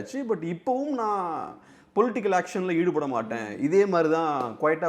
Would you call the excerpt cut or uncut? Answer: uncut